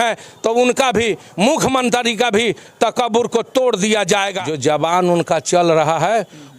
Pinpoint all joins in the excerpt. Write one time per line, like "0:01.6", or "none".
0:04.4